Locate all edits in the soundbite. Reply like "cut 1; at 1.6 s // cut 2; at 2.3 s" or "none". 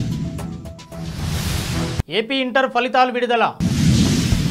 none